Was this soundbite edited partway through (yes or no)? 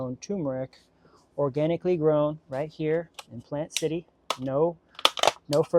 no